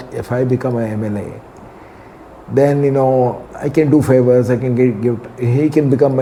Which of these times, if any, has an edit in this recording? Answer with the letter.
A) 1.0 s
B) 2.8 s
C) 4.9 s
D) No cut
D